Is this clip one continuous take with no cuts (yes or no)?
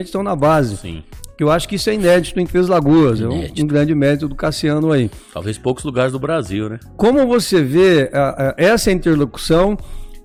yes